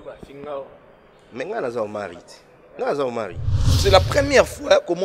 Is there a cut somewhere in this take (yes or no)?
yes